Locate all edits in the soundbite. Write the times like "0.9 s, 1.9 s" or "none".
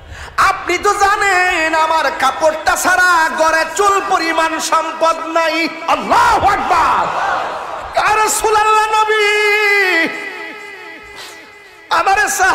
7.7 s

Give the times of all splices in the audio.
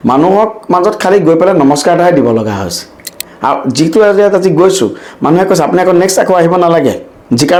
none

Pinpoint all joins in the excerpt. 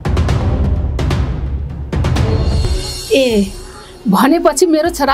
2.6 s

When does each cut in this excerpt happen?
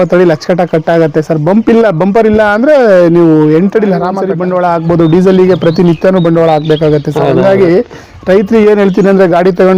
4.3 s

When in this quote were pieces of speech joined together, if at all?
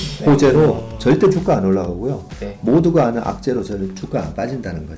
none

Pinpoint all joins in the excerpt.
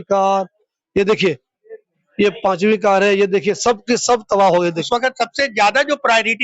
4.8 s

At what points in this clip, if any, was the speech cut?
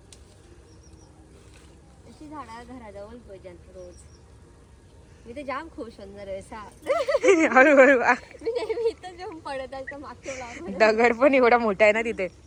none

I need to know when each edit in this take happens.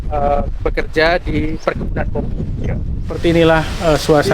3.2 s

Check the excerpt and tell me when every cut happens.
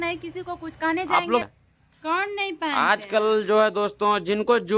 1.4 s

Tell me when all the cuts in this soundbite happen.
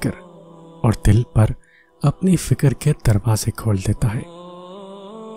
4.3 s

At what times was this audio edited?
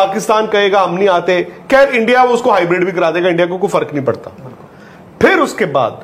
none

